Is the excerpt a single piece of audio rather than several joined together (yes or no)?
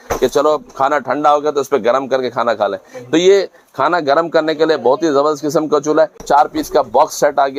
no